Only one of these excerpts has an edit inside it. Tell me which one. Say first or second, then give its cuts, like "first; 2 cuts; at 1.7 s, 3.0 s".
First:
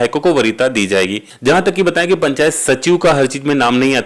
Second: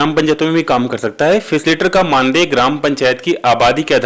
first; 1 cut; at 1.3 s